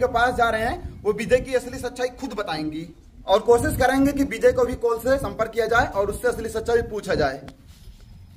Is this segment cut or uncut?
uncut